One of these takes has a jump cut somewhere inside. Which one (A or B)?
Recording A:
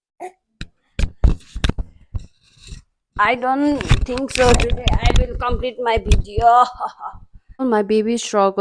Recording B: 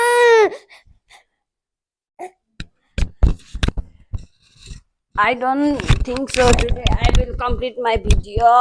A